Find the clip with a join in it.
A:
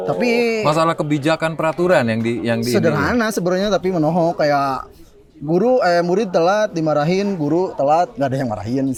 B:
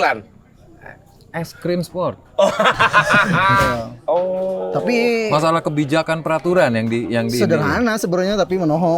B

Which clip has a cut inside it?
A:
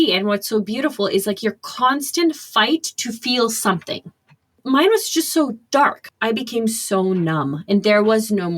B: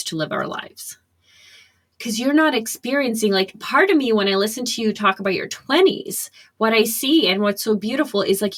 A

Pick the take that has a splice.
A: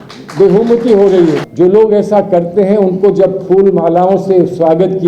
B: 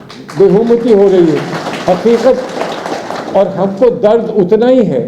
A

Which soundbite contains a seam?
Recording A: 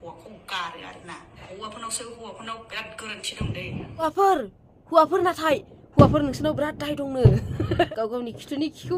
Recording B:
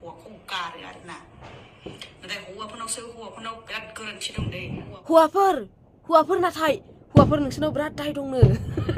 A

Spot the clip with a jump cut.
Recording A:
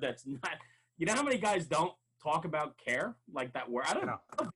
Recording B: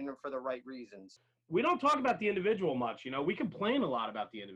B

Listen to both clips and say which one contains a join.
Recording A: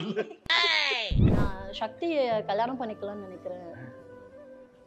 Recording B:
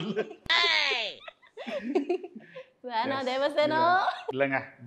A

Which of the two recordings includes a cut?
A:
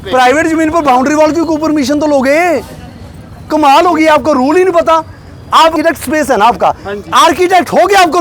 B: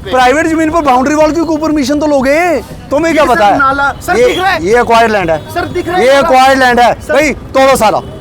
B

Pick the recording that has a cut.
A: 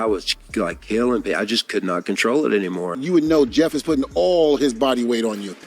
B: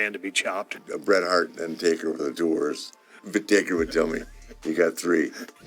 A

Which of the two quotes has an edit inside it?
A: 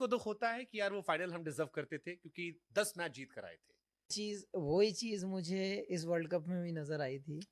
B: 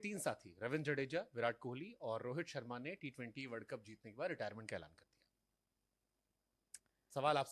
A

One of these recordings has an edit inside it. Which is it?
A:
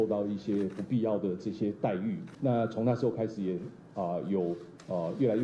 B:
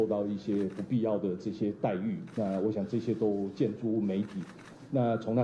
A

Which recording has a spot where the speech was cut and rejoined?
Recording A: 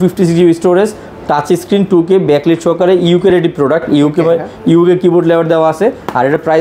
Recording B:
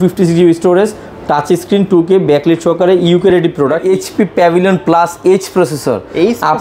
B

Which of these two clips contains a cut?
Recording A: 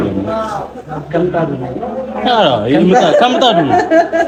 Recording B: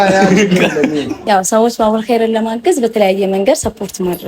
B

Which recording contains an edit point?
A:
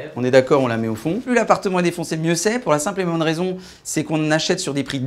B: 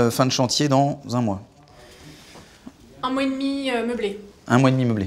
A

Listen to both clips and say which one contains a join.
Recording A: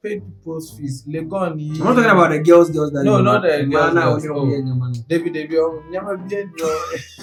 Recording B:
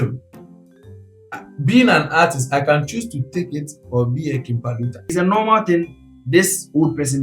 B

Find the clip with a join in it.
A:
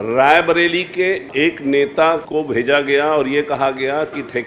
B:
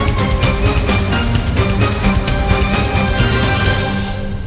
A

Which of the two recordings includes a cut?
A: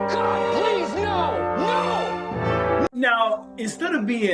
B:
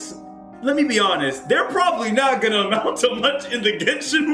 A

